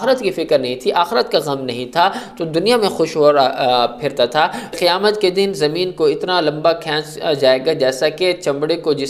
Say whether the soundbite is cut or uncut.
cut